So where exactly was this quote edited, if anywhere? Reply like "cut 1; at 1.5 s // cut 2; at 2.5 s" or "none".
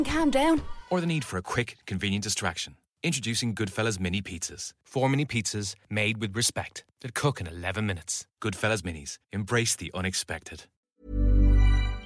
cut 1; at 10.9 s